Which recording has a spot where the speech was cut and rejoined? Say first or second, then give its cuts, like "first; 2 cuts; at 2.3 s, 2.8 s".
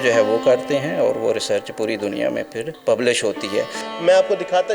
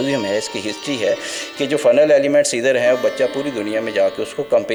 first; 1 cut; at 3.8 s